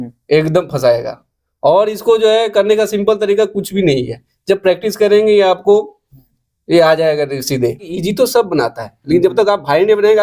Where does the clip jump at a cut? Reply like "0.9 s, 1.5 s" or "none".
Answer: 7.9 s